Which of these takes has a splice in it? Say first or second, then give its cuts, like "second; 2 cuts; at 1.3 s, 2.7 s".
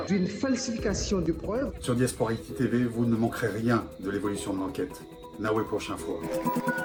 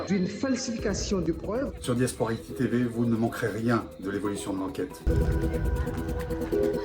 second; 1 cut; at 5.1 s